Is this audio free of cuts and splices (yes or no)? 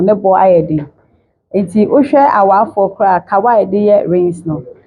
yes